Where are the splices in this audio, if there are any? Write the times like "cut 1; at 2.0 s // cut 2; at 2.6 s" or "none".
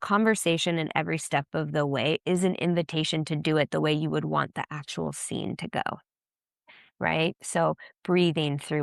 none